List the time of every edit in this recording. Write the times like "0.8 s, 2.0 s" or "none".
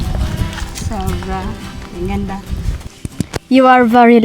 2.7 s